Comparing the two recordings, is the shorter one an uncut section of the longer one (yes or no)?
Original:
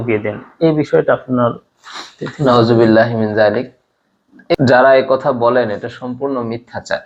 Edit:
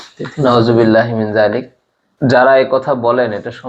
no